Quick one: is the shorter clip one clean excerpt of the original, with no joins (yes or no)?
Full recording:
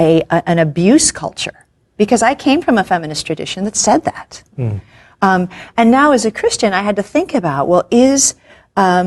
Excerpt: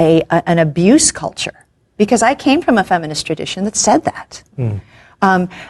yes